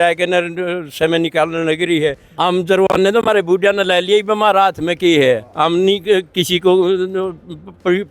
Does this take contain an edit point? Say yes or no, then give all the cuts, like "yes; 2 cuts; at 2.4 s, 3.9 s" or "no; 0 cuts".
yes; 1 cut; at 2.2 s